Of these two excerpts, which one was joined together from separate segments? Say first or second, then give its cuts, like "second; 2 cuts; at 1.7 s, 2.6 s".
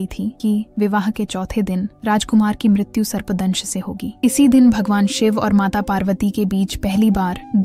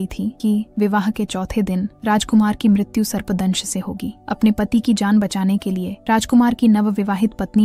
first; 1 cut; at 4.1 s